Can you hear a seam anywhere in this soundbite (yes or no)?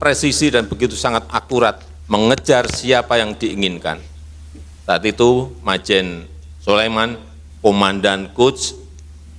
yes